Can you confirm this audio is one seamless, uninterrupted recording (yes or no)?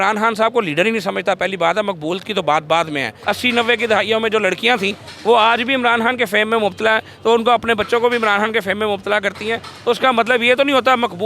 no